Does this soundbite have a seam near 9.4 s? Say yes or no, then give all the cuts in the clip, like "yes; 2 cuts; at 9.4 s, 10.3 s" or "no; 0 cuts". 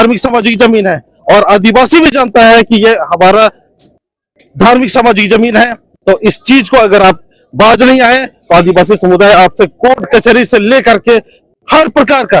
no; 0 cuts